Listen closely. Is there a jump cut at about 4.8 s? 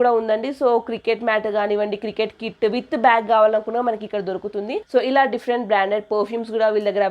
yes; 1 cut; at 4.8 s

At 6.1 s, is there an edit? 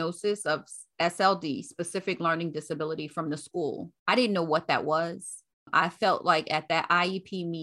no; 1 cut; at 3.9 s

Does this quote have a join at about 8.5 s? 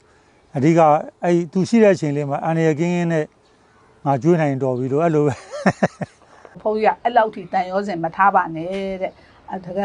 no; 1 cut; at 6.6 s

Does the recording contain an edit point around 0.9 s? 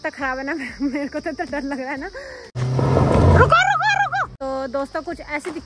no; 2 cuts; at 2.5 s, 4.3 s

